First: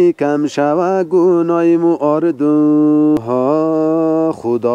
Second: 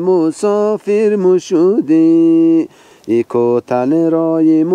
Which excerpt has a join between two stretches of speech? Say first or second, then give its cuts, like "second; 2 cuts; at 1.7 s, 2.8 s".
first; 1 cut; at 3.2 s